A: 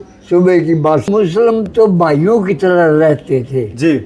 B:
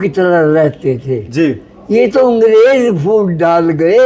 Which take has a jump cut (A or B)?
A